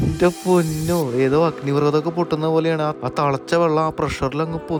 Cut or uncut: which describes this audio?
uncut